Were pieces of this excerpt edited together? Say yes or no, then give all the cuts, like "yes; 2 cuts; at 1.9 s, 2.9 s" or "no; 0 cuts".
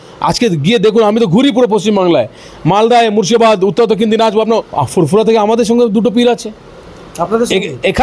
yes; 1 cut; at 4.4 s